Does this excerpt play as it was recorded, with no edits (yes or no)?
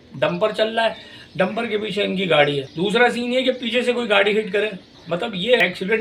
no